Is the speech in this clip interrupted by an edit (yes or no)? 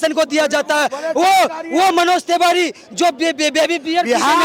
no